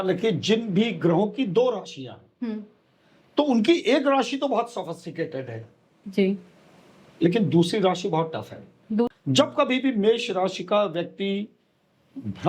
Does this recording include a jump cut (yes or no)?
yes